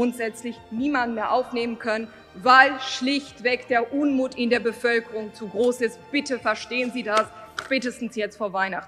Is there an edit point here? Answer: no; 0 cuts

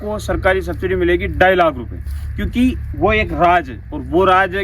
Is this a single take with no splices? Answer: yes; 0 cuts

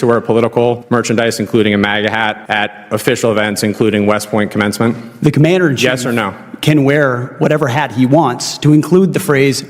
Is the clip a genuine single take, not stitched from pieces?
no; 2 cuts; at 0.8 s, 2.4 s

